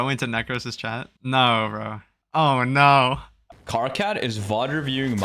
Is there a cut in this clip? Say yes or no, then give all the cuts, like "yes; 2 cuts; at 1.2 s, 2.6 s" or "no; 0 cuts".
no; 0 cuts